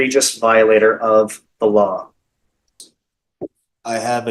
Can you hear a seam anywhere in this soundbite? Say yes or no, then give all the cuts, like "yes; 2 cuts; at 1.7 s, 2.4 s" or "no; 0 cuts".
yes; 1 cut; at 2.8 s